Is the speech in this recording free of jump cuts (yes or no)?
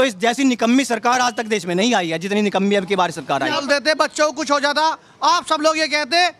no